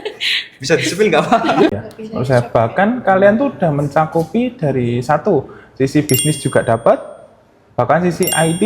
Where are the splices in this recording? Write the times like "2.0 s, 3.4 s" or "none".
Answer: 1.7 s